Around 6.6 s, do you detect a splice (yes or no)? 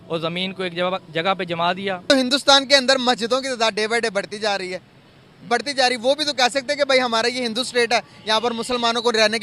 no